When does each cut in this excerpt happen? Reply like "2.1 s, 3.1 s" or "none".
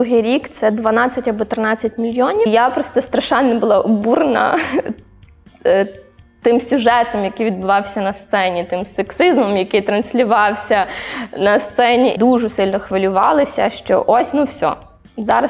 2.5 s, 12.1 s